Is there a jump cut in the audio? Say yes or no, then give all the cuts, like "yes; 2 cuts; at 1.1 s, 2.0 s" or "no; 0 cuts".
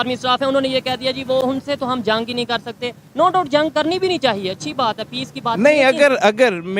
no; 0 cuts